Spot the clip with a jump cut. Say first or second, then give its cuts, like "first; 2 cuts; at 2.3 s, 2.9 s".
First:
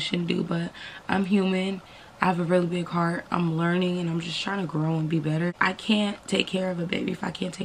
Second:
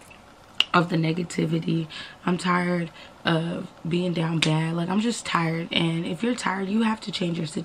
first; 1 cut; at 5.5 s